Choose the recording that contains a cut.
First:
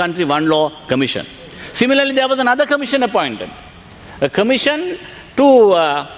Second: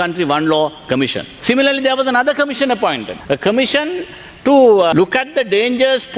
second; 3 cuts; at 1.3 s, 3.1 s, 4.9 s

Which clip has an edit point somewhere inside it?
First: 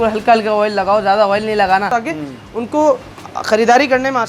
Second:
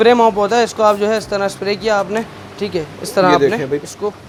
first; 1 cut; at 1.9 s

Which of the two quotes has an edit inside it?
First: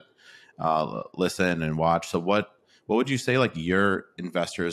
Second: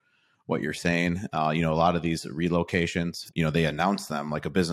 second; 1 cut; at 3.2 s

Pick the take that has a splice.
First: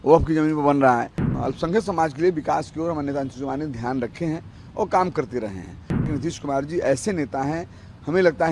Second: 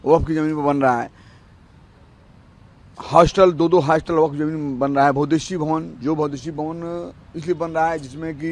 first; 2 cuts; at 1.2 s, 6.1 s

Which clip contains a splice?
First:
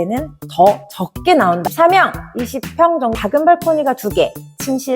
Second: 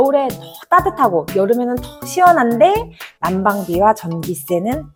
first; 2 cuts; at 1.6 s, 3.1 s

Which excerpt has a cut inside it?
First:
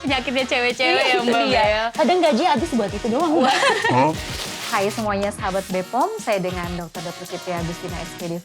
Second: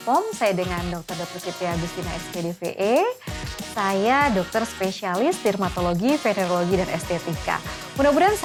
first; 1 cut; at 4.4 s

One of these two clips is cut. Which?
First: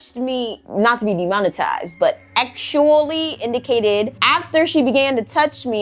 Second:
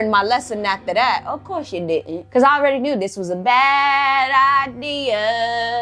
first; 1 cut; at 4.2 s

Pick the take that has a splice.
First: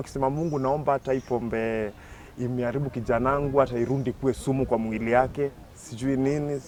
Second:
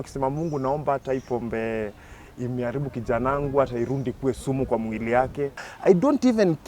second; 1 cut; at 5.7 s

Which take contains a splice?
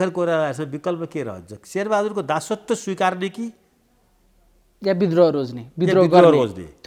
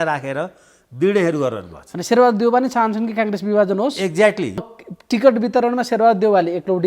second; 1 cut; at 4.7 s

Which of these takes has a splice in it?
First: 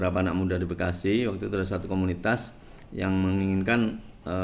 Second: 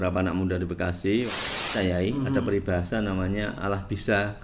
second; 1 cut; at 1.6 s

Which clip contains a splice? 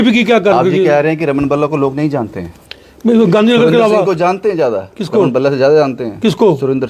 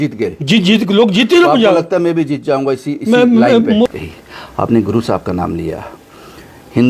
second; 1 cut; at 3.9 s

